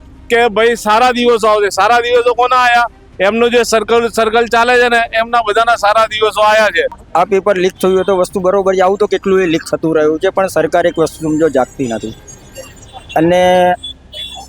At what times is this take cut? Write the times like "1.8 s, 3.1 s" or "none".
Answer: 7.0 s